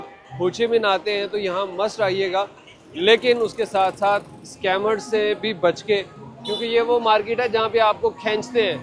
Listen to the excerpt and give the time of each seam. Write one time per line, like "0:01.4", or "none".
none